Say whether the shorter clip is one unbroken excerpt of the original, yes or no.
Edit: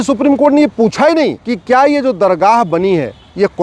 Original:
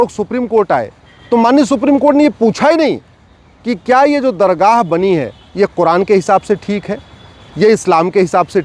no